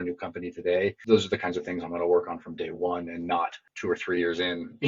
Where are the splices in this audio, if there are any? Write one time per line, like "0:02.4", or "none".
0:01.0
0:03.7